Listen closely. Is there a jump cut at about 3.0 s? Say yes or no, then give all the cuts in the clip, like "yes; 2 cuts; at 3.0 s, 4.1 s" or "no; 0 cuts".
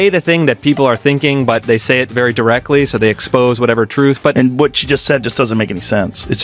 no; 1 cut; at 4.3 s